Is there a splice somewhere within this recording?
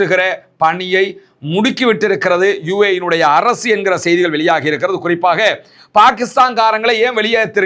no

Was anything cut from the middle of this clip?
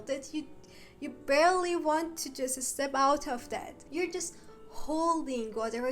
yes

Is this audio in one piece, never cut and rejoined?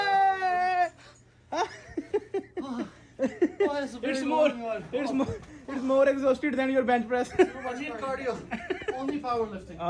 yes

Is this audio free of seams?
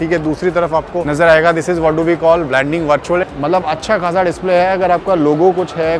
no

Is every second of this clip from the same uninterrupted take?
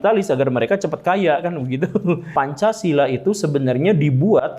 no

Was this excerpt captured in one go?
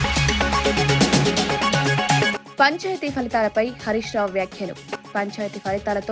no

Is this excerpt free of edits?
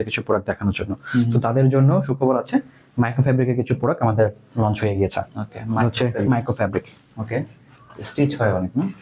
yes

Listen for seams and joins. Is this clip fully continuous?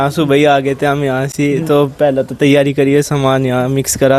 yes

